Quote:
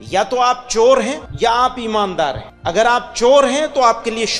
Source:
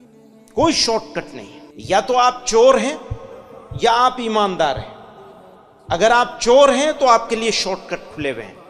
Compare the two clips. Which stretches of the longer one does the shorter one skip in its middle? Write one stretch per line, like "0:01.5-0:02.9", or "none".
0:03.0-0:03.7
0:04.9-0:05.7